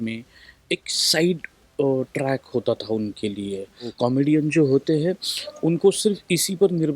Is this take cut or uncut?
cut